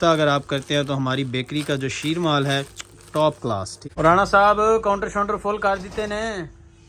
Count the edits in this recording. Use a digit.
1